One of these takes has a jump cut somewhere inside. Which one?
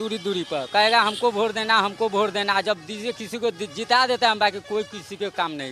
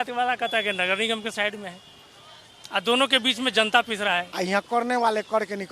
second; 1 cut; at 4.3 s

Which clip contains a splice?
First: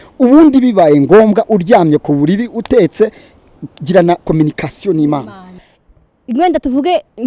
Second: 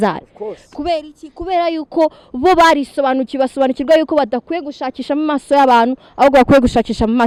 first; 1 cut; at 5.6 s

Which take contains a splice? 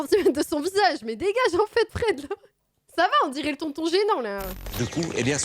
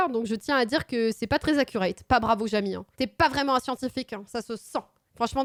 first; 2 cuts; at 2.8 s, 4.6 s

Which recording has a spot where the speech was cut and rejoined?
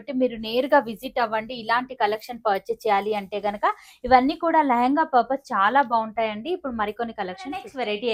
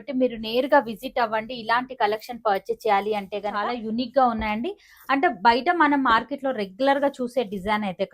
second; 1 cut; at 3.7 s

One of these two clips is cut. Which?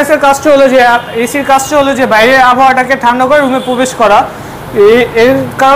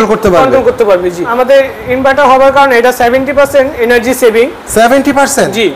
second; 1 cut; at 1.3 s

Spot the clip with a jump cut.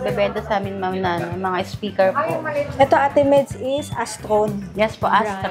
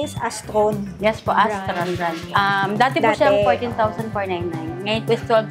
first; 1 cut; at 2.7 s

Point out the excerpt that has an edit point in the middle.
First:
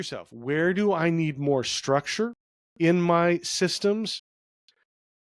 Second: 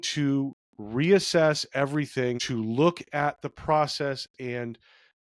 second; 1 cut; at 2.4 s

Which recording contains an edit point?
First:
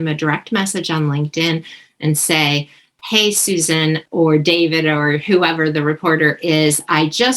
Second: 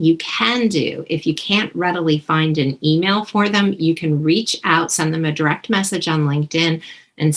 first; 1 cut; at 4.0 s

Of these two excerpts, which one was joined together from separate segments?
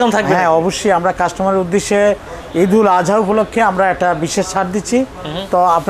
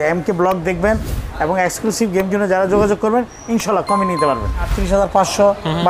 second; 1 cut; at 4.7 s

